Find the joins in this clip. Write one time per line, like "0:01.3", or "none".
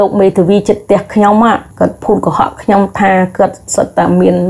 0:01.7